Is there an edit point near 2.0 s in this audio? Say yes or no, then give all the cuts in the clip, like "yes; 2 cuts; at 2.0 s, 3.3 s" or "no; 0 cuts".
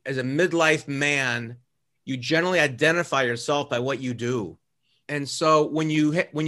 no; 1 cut; at 4.9 s